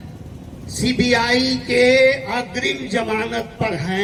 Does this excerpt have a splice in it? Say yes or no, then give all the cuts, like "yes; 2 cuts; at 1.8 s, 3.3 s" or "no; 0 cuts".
no; 0 cuts